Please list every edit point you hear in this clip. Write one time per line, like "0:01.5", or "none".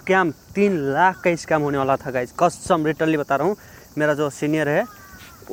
none